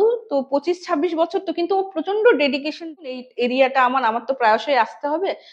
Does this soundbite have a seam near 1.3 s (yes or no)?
no